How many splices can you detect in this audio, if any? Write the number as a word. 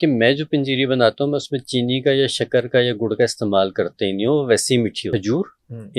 one